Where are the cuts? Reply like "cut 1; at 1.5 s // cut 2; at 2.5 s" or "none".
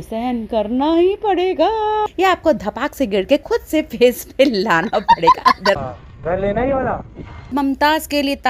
cut 1; at 2.1 s // cut 2; at 5.8 s // cut 3; at 7.5 s